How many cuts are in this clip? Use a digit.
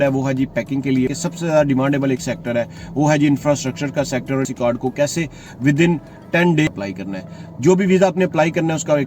3